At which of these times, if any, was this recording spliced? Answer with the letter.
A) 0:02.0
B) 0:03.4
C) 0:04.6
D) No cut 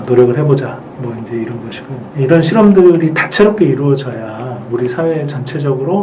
A